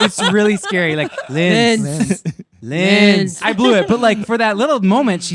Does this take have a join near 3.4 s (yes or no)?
yes